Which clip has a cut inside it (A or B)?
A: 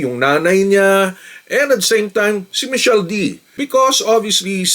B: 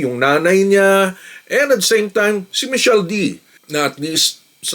B